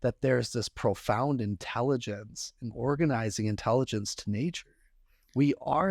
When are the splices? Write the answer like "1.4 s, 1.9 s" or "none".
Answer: none